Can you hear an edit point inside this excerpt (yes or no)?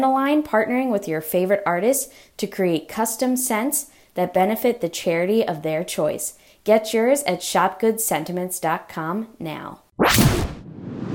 yes